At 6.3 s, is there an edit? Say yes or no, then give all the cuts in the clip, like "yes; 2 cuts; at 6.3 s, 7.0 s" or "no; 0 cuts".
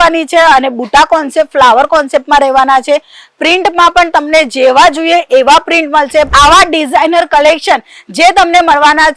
yes; 1 cut; at 6.3 s